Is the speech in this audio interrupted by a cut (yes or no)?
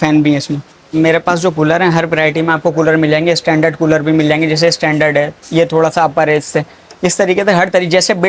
yes